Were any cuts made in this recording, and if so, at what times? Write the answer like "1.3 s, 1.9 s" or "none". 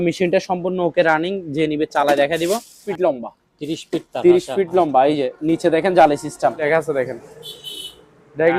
2.8 s, 6.6 s